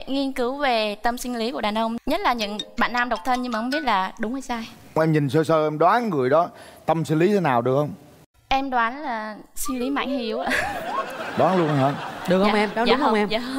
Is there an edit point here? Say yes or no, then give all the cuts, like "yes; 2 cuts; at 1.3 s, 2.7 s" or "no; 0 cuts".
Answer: no; 0 cuts